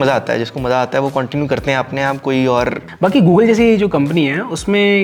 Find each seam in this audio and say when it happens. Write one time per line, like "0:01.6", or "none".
0:02.9